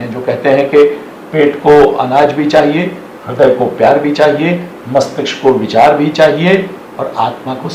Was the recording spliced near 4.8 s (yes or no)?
no